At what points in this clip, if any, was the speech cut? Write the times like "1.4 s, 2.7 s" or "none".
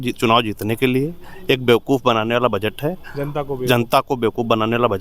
none